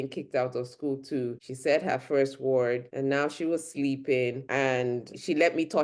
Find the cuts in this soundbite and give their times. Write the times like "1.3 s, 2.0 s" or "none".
1.5 s, 2.9 s, 5.0 s